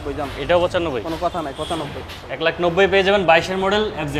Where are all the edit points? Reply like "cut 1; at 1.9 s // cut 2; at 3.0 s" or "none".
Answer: cut 1; at 2.5 s